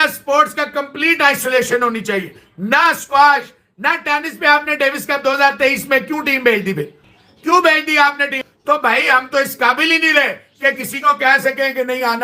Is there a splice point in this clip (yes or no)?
no